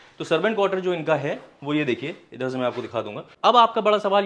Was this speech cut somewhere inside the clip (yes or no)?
yes